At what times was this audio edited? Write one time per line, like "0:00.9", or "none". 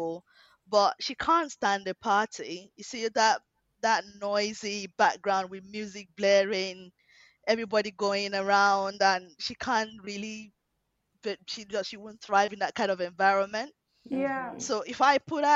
none